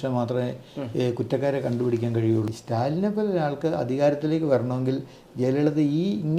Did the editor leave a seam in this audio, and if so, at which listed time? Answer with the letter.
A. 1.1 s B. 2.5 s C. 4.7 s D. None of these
B